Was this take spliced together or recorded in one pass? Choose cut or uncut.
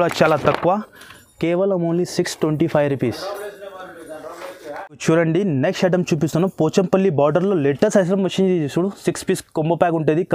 uncut